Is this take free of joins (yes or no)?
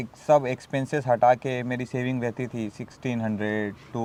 yes